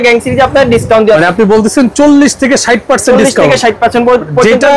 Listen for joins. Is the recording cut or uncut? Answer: uncut